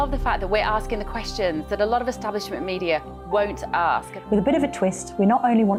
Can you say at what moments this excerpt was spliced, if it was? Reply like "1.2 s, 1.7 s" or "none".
none